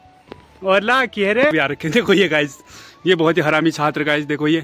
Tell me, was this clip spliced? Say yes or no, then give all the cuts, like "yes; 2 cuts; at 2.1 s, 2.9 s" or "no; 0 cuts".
yes; 1 cut; at 1.5 s